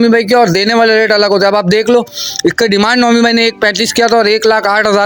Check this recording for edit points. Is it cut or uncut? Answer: uncut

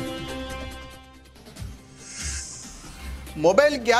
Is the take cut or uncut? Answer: cut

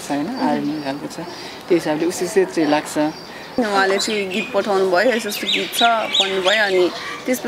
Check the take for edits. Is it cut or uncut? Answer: cut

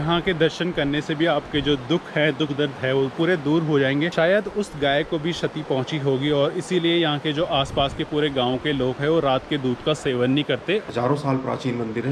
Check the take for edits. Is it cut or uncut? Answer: cut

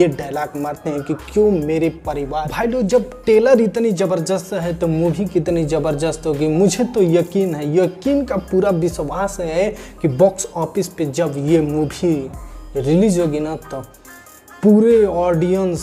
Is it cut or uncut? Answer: cut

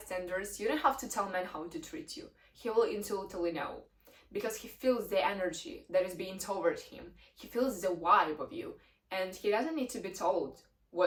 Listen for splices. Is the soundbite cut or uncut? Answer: uncut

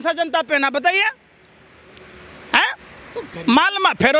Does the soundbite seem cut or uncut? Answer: uncut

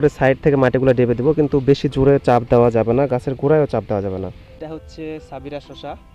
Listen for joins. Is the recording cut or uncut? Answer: cut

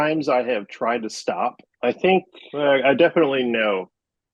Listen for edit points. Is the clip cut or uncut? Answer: cut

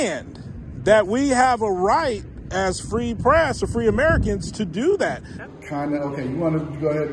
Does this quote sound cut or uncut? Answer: cut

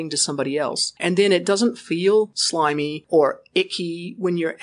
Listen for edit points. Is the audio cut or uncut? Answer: cut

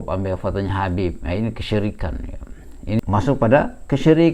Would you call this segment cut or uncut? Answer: cut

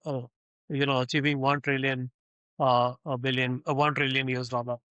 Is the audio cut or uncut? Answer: uncut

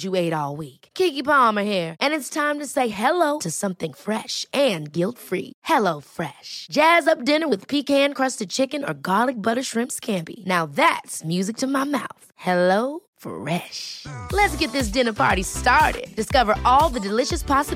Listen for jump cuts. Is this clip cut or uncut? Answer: uncut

